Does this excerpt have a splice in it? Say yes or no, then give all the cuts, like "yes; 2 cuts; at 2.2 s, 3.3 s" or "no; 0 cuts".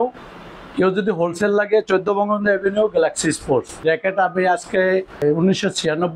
yes; 2 cuts; at 3.8 s, 5.2 s